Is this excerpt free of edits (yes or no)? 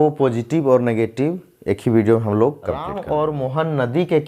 no